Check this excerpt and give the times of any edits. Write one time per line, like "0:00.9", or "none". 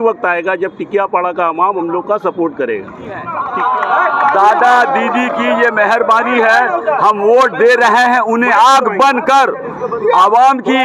0:03.4